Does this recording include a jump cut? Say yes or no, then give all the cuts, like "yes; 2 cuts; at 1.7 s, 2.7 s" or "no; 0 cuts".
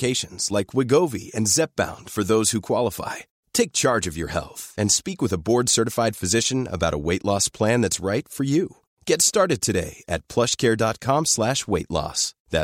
no; 0 cuts